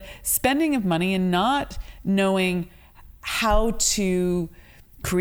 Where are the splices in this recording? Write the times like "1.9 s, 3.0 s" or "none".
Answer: none